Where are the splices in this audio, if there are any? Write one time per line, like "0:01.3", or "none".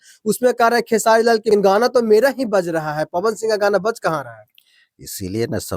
0:01.5